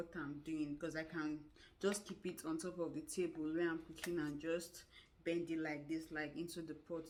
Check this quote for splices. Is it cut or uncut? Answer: uncut